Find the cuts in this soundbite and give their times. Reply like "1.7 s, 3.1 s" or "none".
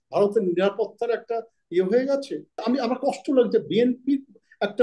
2.5 s